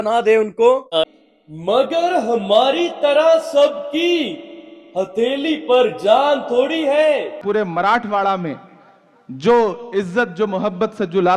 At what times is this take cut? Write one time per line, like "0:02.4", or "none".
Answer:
0:01.1
0:07.4